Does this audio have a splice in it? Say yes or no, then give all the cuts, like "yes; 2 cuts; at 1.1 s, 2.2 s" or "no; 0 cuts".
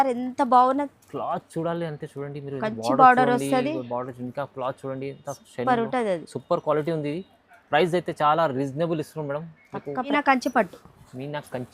yes; 1 cut; at 10.1 s